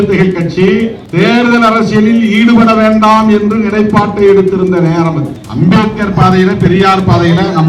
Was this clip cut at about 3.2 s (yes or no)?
no